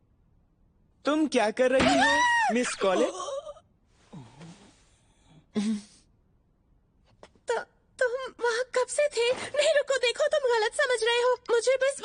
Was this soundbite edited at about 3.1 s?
no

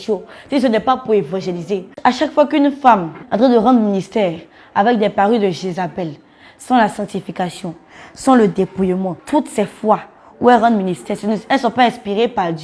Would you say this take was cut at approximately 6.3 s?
no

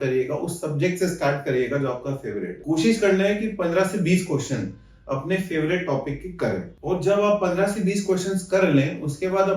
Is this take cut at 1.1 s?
no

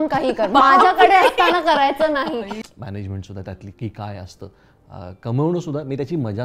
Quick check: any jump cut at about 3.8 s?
no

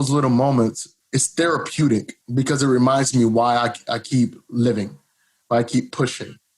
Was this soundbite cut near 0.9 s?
yes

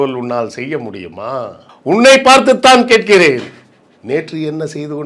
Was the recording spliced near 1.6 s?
yes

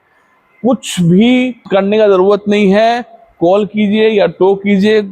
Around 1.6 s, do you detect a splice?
yes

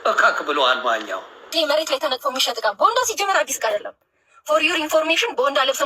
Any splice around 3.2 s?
no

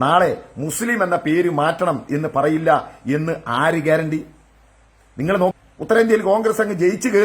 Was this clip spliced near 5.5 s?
yes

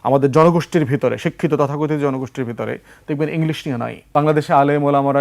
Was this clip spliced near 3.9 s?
yes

